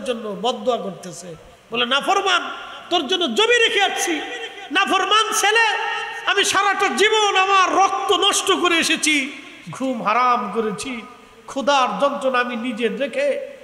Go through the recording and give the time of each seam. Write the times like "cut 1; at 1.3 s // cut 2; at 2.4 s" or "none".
none